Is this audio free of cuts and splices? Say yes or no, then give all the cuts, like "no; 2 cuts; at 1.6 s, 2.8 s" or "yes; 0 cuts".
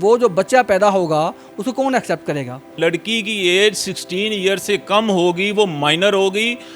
no; 1 cut; at 2.7 s